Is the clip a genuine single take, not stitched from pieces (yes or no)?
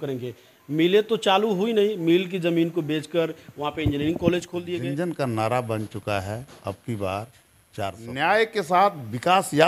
no